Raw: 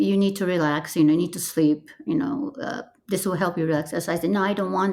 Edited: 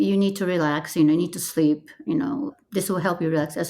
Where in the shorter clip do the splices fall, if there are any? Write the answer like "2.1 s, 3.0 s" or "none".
2.6 s